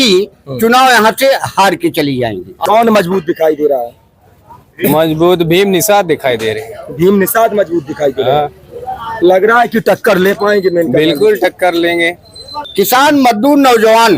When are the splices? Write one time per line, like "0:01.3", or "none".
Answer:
0:02.6
0:12.6